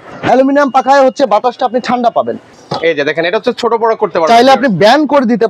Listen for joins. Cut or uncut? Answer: cut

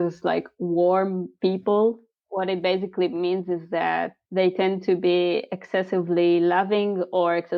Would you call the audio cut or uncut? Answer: cut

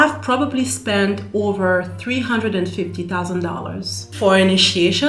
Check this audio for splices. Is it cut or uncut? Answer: uncut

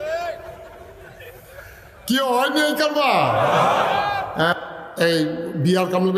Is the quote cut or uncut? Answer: cut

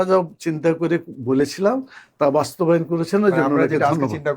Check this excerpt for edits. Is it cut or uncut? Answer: uncut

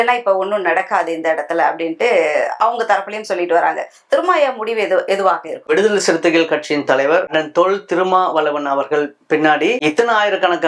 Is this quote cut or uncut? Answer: uncut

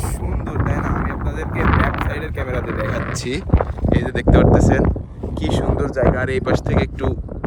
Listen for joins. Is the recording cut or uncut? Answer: uncut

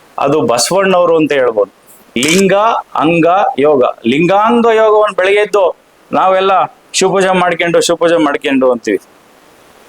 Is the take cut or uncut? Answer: cut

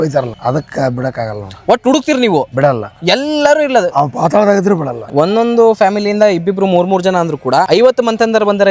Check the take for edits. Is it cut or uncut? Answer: cut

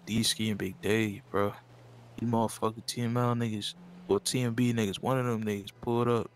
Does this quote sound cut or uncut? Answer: uncut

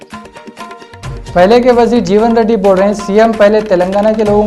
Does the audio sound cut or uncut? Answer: uncut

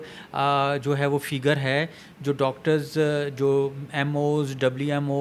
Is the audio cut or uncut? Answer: uncut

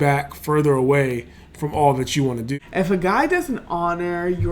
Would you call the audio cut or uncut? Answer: cut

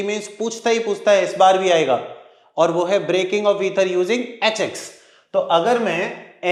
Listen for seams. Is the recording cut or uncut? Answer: uncut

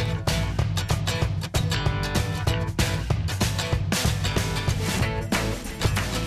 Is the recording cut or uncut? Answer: uncut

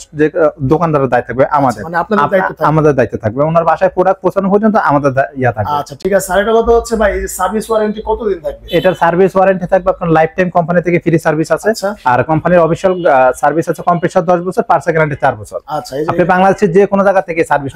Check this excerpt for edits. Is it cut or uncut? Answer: uncut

